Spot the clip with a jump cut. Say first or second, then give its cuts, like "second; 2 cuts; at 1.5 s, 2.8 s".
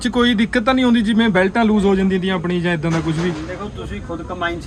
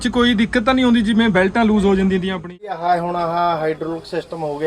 second; 1 cut; at 2.5 s